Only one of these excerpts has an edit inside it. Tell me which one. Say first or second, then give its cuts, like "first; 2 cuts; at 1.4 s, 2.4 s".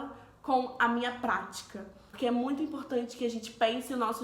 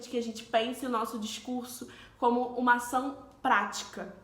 first; 1 cut; at 2.1 s